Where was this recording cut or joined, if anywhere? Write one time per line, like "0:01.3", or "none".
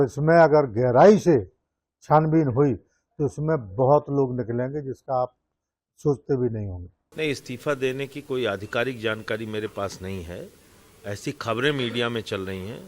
none